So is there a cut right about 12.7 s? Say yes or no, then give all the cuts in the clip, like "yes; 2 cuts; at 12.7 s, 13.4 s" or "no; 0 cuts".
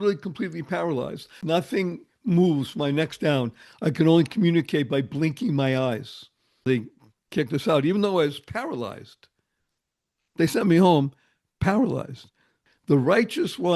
yes; 3 cuts; at 1.4 s, 6.6 s, 12.7 s